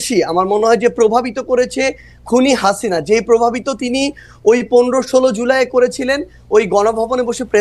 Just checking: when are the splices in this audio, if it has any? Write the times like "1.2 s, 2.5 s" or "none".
none